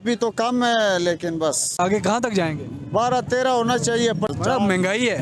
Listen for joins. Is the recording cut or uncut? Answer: cut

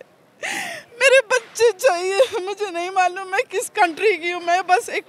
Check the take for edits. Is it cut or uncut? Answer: uncut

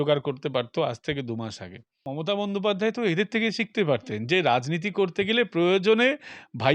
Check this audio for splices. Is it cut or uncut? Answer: cut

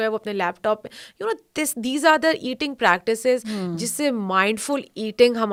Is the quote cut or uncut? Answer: uncut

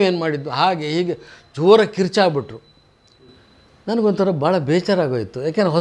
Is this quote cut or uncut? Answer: uncut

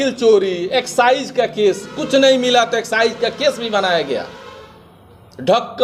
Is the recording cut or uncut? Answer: uncut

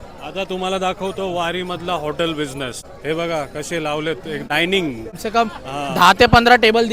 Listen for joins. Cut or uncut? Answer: cut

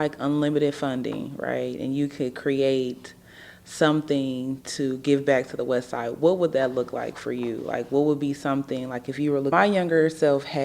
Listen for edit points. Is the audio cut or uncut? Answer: cut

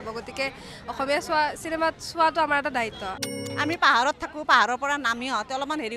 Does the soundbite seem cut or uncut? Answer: cut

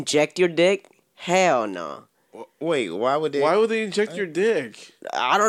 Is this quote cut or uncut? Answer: uncut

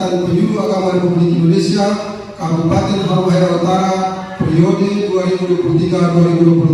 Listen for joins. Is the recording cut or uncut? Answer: uncut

